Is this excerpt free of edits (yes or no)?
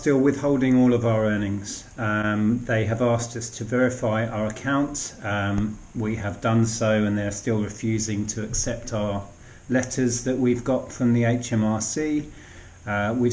yes